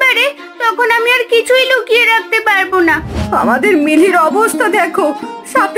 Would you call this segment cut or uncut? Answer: cut